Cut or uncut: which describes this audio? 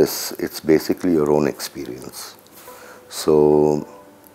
uncut